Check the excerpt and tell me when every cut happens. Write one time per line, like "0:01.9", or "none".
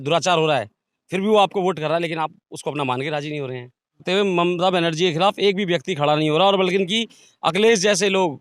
0:04.0